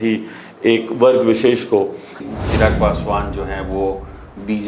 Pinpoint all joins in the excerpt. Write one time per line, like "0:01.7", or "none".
0:02.2